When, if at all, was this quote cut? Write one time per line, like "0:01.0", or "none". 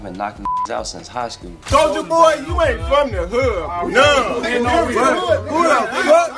0:01.5